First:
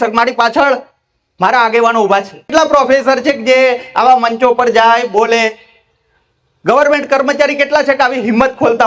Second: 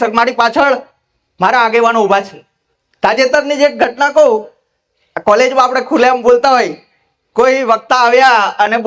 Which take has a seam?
first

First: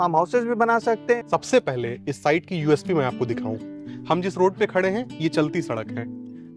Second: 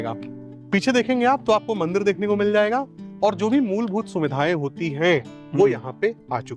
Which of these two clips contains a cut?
first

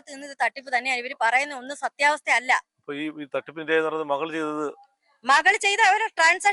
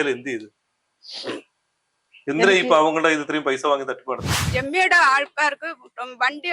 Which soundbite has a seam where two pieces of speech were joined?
second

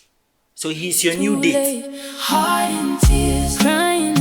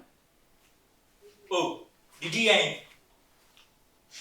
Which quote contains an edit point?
first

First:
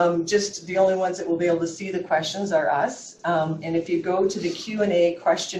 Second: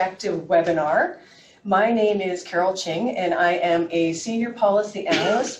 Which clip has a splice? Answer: first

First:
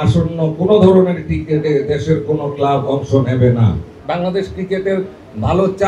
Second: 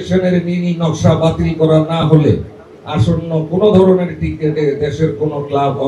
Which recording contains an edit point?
first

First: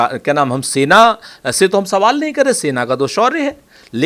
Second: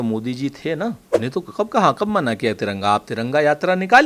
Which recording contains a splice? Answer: second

